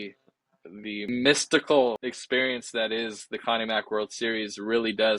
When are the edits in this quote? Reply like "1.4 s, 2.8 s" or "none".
1.1 s, 2.0 s